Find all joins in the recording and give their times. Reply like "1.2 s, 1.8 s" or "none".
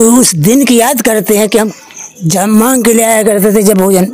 1.7 s